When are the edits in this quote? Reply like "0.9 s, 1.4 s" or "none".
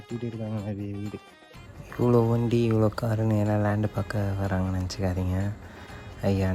1.8 s